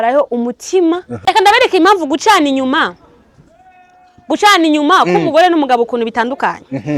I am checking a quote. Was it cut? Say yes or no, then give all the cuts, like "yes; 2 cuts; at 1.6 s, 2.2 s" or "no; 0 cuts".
yes; 1 cut; at 1.2 s